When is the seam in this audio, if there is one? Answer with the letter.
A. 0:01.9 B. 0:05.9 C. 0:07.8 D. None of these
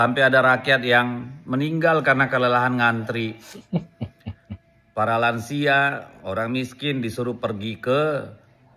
B